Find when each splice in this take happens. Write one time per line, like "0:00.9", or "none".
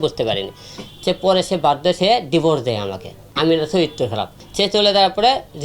0:03.2
0:04.4